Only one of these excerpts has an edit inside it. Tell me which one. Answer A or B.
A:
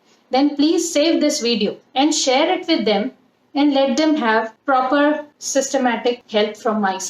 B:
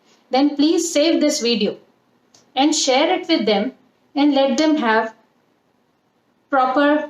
A